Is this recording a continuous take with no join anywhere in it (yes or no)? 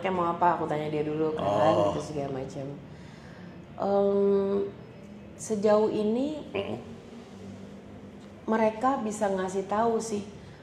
yes